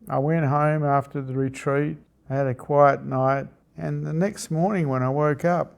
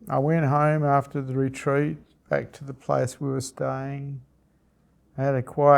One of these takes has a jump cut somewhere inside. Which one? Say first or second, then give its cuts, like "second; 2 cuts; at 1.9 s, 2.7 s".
first; 2 cuts; at 2.1 s, 3.6 s